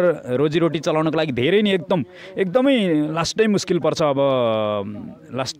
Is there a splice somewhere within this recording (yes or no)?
no